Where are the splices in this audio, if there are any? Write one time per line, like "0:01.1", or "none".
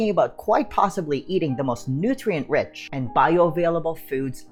none